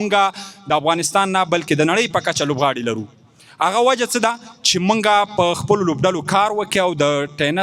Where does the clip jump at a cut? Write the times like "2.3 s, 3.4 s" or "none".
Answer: none